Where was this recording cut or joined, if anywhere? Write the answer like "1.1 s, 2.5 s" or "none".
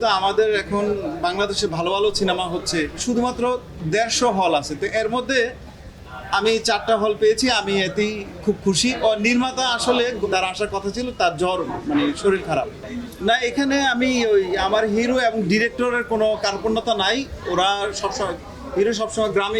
3.0 s, 8.9 s, 10.2 s, 12.8 s